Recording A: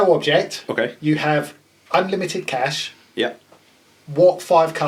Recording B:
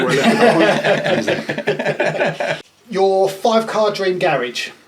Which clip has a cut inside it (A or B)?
B